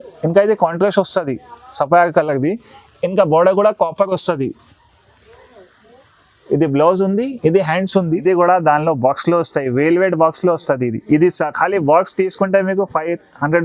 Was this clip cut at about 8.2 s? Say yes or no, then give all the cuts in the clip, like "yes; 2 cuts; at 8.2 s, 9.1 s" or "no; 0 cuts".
yes; 1 cut; at 8.2 s